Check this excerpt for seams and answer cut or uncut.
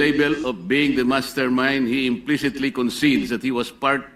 uncut